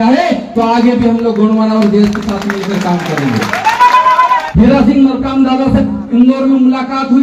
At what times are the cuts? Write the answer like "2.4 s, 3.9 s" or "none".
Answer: 4.5 s